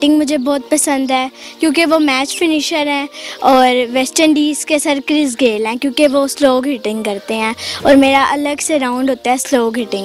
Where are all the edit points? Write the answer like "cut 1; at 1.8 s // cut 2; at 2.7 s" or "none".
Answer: none